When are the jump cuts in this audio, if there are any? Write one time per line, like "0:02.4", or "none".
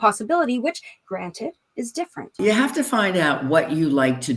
0:00.9
0:02.3